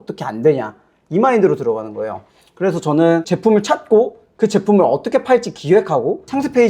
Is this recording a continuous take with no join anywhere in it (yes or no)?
yes